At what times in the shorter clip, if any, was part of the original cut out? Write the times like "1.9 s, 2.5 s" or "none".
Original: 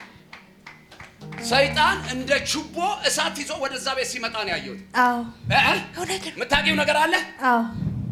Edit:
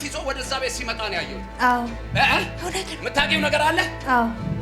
none

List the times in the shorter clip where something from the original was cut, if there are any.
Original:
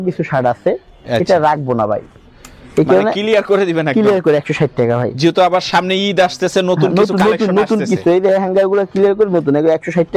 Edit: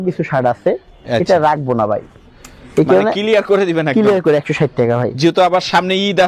none

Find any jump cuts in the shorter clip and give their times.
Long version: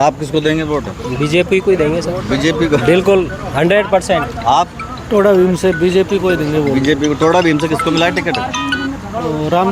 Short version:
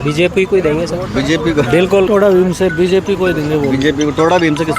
2.1 s

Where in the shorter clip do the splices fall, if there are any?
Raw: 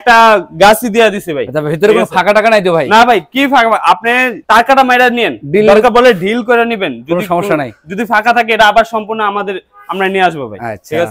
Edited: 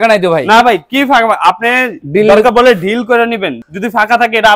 2.0 s, 3.6 s

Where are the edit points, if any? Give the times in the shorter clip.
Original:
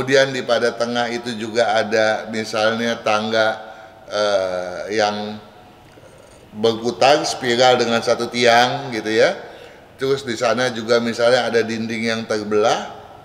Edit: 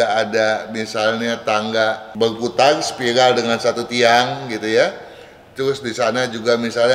2.1 s

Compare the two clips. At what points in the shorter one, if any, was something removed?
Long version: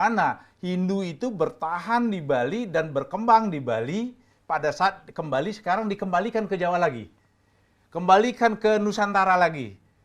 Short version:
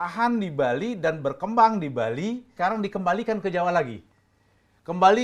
2.5 s

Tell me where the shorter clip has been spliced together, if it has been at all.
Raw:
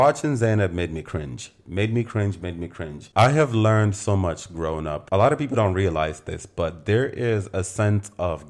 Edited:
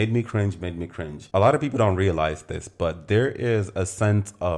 1.2 s

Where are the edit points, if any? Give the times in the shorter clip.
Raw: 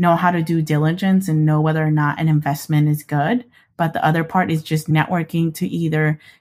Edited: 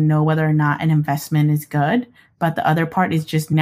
none

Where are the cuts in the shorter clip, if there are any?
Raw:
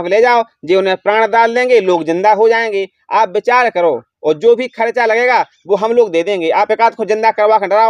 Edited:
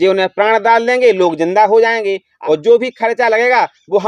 2.3 s

